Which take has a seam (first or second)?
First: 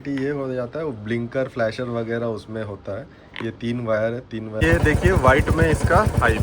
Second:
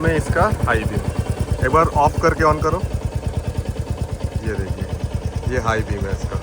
first